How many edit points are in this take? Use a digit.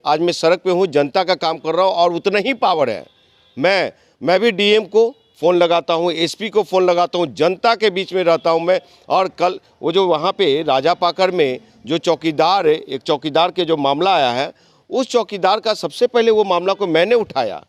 0